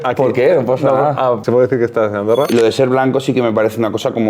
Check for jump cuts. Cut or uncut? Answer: cut